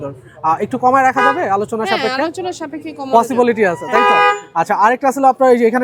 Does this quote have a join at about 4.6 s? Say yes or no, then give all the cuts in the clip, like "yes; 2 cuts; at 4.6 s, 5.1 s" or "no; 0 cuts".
no; 0 cuts